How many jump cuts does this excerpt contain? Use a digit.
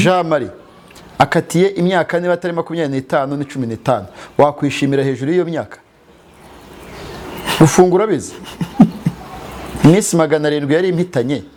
0